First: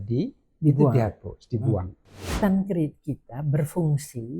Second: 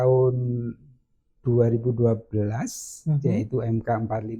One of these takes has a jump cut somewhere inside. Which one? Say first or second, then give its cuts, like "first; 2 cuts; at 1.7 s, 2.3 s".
first; 1 cut; at 2.3 s